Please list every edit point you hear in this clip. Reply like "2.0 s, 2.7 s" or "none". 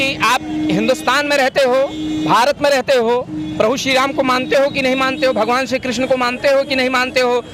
none